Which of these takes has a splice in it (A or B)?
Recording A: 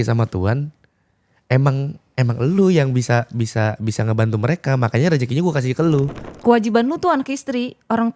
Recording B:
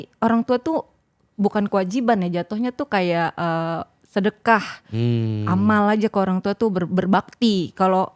A